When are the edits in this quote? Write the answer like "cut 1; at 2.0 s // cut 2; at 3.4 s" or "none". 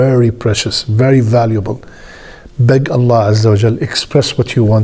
none